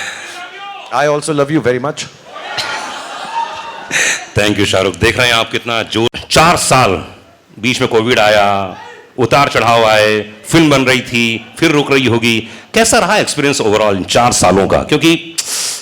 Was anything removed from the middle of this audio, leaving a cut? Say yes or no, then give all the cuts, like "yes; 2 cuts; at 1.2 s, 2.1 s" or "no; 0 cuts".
no; 0 cuts